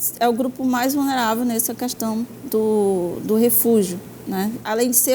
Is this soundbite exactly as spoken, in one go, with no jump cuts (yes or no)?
yes